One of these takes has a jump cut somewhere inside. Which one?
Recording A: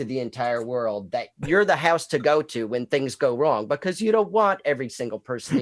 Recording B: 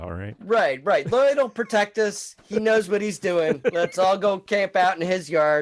A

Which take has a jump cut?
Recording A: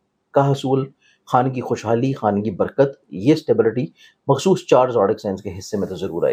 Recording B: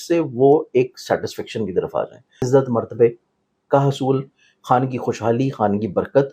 B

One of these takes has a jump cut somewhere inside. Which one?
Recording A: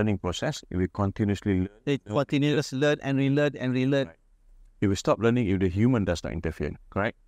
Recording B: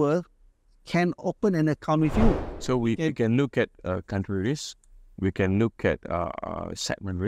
B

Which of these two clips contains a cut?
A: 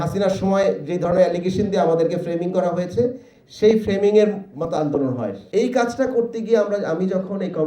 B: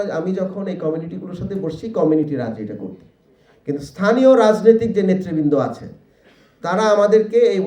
A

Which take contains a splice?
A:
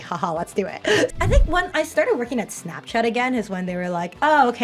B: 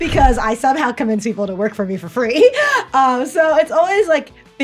A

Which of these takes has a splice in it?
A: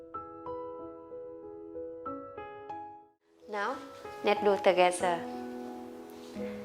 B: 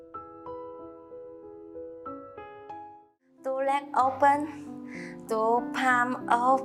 A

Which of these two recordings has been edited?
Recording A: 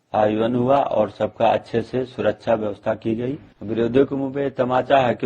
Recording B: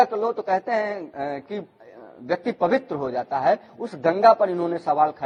A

